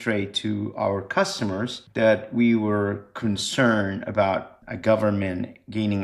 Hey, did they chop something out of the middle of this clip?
yes; 2 cuts; at 1.8 s, 4.6 s

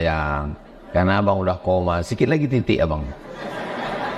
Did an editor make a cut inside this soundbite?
no; 0 cuts

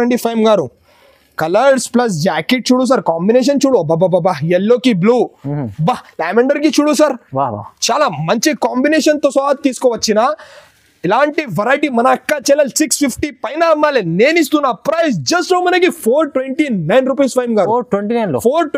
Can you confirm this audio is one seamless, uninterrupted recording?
yes; 0 cuts

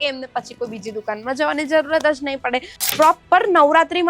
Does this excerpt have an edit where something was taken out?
yes; 1 cut; at 2.7 s

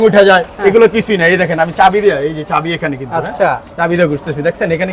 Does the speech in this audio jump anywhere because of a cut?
no; 0 cuts

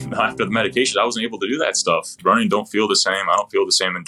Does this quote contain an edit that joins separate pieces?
yes; 1 cut; at 2.1 s

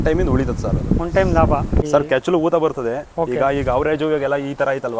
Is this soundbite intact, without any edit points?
no; 1 cut; at 1.8 s

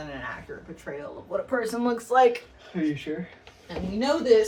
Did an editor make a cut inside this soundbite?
no; 0 cuts

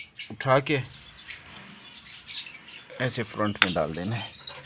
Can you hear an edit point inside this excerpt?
no; 0 cuts

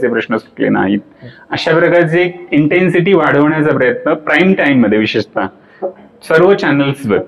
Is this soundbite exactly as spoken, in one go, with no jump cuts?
yes; 0 cuts

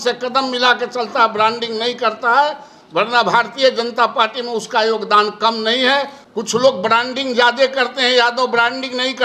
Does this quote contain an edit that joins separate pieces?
yes; 1 cut; at 6.2 s

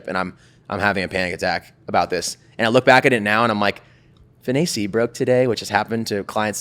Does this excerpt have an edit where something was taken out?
no; 0 cuts

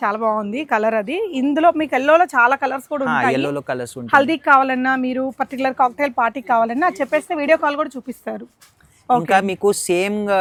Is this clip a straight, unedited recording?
yes; 0 cuts

